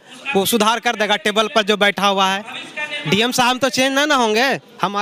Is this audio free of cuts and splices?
yes; 0 cuts

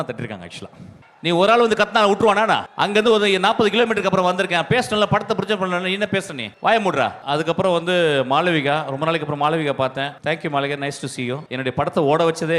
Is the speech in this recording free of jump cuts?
no; 6 cuts; at 1.1 s, 2.7 s, 6.4 s, 7.2 s, 10.2 s, 11.5 s

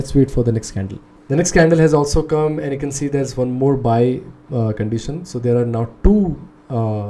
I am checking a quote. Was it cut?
no; 0 cuts

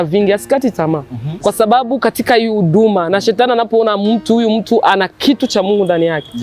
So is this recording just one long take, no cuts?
no; 1 cut; at 1.2 s

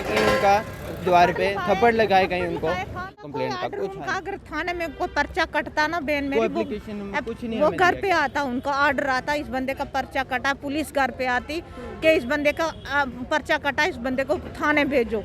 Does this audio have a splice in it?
yes; 1 cut; at 3.2 s

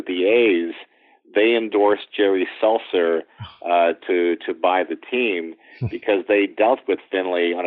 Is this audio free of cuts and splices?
yes; 0 cuts

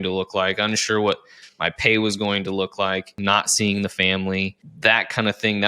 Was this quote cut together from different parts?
yes; 2 cuts; at 3.1 s, 4.6 s

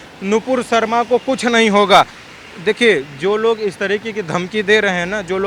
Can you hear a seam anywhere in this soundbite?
yes; 1 cut; at 2.2 s

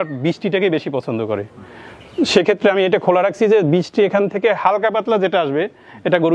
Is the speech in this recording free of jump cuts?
yes; 0 cuts

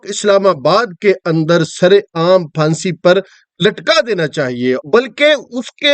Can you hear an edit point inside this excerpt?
yes; 1 cut; at 4.8 s

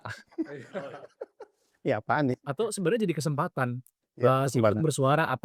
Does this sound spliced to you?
no; 0 cuts

